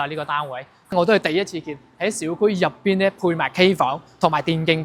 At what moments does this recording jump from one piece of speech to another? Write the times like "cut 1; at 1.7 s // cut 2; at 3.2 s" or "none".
cut 1; at 0.9 s